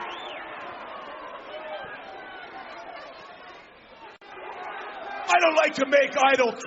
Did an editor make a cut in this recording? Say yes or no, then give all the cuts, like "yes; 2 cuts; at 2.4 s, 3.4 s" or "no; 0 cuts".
yes; 1 cut; at 4.3 s